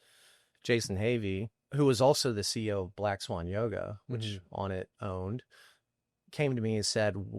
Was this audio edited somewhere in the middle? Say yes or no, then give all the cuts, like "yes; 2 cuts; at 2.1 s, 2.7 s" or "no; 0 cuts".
yes; 1 cut; at 1.6 s